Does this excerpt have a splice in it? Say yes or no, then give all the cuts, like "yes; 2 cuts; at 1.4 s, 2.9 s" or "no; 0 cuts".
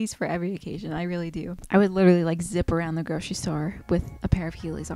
no; 0 cuts